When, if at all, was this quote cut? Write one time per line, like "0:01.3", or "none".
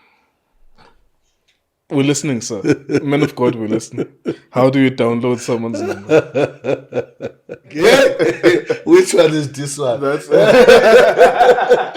0:07.8